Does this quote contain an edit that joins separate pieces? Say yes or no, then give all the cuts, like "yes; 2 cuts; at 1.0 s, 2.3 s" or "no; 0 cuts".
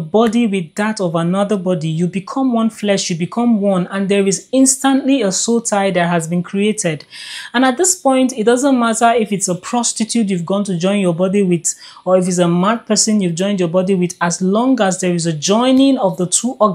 no; 0 cuts